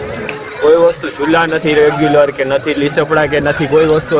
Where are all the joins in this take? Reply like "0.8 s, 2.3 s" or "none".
none